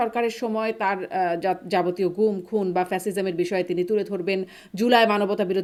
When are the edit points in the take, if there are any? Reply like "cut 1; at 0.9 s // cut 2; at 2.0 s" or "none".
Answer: none